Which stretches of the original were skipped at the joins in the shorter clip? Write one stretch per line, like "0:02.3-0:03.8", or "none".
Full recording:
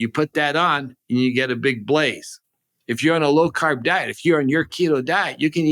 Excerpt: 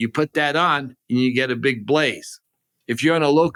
none

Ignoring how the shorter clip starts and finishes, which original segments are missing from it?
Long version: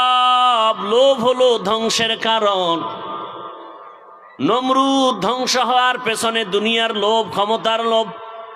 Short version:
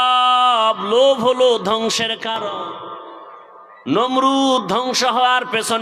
0:02.4-0:02.9

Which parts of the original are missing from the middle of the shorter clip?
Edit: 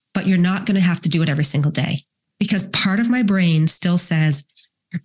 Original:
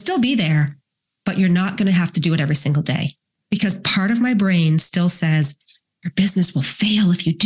none

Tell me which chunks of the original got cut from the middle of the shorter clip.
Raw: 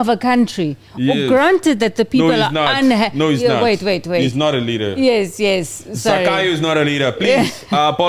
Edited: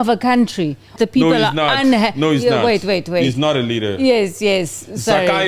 0:00.9-0:01.9

